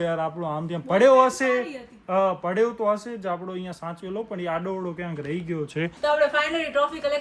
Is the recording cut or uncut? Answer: uncut